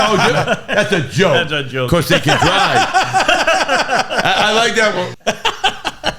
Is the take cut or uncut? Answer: uncut